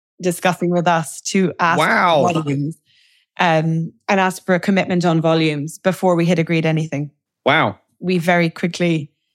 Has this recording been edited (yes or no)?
yes